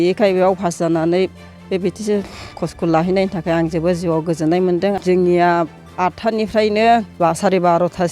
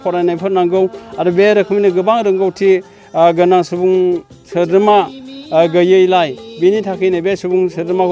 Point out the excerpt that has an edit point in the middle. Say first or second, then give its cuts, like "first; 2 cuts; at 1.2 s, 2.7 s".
first; 2 cuts; at 5.0 s, 7.1 s